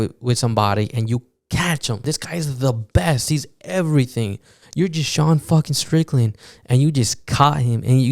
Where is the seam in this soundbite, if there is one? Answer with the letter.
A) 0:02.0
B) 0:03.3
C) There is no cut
A